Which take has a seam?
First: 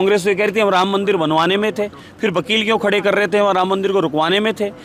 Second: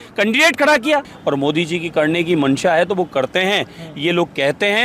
second; 1 cut; at 1.1 s

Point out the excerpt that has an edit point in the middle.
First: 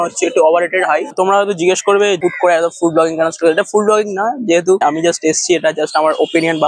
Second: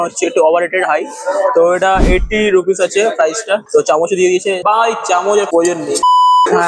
first; 2 cuts; at 1.1 s, 2.2 s

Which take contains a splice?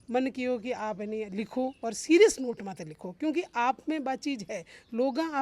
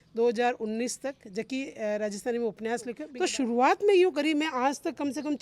second; 1 cut; at 3.0 s

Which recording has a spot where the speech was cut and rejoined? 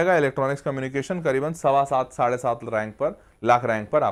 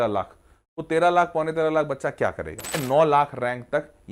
second; 1 cut; at 2.8 s

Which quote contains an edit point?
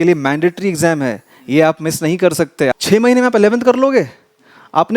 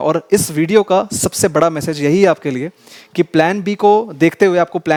first; 1 cut; at 2.8 s

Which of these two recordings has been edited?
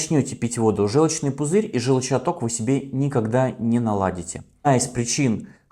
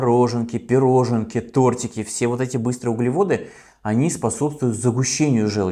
first; 1 cut; at 4.7 s

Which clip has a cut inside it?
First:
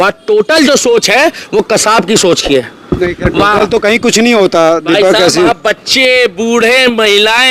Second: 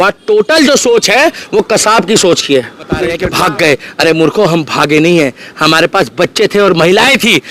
second; 1 cut; at 3.2 s

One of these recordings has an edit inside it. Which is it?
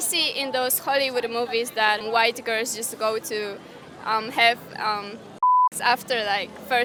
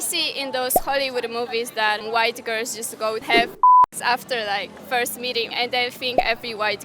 second; 2 cuts; at 3.3 s, 5.5 s

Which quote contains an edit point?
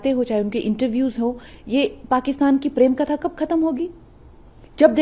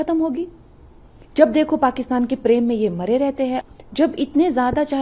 second; 1 cut; at 3.6 s

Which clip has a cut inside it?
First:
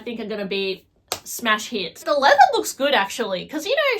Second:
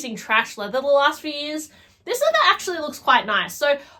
first; 1 cut; at 2.0 s

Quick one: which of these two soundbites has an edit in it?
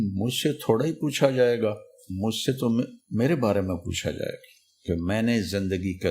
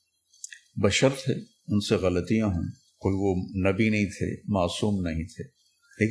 first; 1 cut; at 3.0 s

